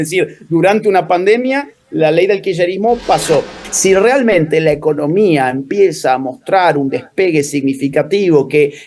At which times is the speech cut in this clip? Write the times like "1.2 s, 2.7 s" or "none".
3.6 s